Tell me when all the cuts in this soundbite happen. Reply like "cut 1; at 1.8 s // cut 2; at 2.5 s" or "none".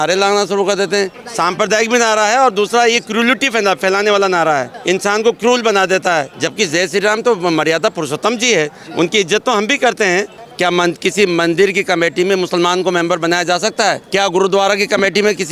cut 1; at 1.2 s // cut 2; at 4.7 s // cut 3; at 6.4 s // cut 4; at 10.4 s // cut 5; at 14.0 s